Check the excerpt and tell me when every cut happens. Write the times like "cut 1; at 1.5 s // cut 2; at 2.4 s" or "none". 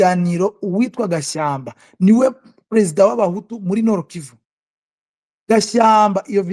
none

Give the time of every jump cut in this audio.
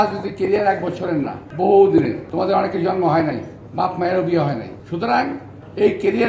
cut 1; at 1.4 s // cut 2; at 2.2 s // cut 3; at 4.8 s

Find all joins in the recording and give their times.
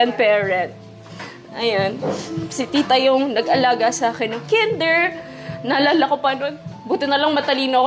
none

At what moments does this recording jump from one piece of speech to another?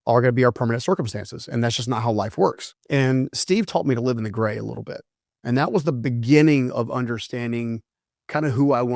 cut 1; at 2.7 s

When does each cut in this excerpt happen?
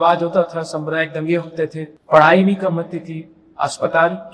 cut 1; at 1.9 s

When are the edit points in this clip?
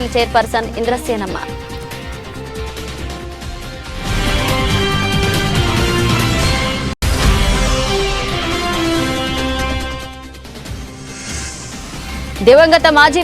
cut 1; at 1.8 s // cut 2; at 7.0 s // cut 3; at 10.9 s

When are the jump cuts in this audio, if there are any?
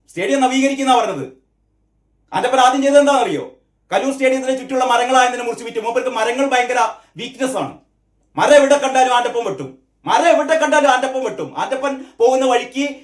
none

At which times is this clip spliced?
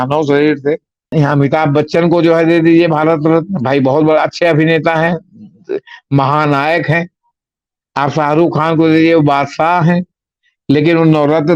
cut 1; at 1.0 s

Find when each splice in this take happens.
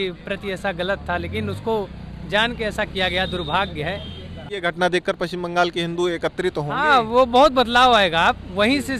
cut 1; at 4.4 s

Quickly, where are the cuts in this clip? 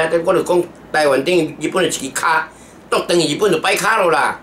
none

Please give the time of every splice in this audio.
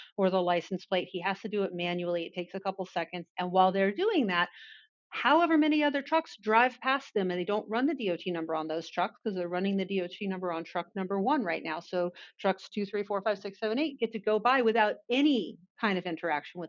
cut 1; at 3.2 s

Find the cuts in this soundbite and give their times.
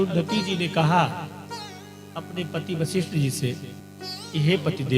none

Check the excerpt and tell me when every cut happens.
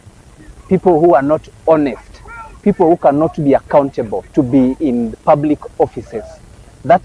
none

